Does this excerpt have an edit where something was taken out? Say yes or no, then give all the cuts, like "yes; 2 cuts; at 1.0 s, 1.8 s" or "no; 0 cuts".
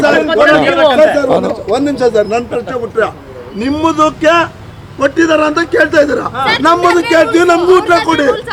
no; 0 cuts